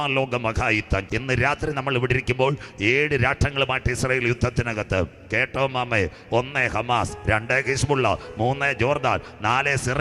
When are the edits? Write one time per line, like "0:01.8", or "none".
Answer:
0:01.0